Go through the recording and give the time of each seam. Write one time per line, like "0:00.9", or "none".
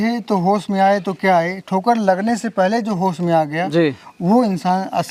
none